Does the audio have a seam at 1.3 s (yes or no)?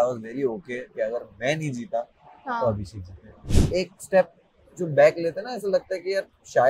no